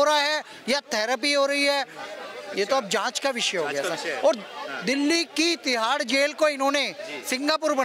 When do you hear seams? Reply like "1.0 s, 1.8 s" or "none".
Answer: none